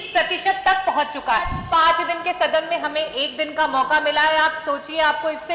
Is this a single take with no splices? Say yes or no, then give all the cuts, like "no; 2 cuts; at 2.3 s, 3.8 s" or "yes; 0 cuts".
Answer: no; 1 cut; at 1.6 s